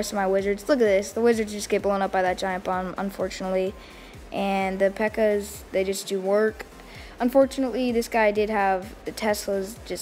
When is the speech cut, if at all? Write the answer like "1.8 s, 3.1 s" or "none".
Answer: none